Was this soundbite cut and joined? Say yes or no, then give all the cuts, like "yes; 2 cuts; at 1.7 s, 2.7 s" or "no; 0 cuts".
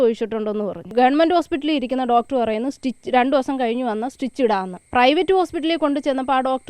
yes; 2 cuts; at 0.9 s, 4.8 s